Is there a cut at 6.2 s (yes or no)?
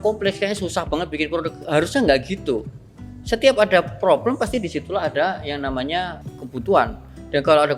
yes